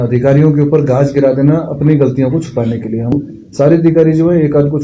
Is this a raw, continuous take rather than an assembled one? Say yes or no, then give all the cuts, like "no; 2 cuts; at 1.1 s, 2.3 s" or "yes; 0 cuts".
no; 1 cut; at 3.1 s